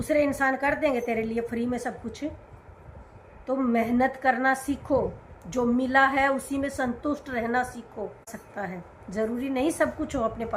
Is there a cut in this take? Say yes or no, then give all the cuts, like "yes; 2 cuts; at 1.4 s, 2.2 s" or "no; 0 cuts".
yes; 1 cut; at 8.4 s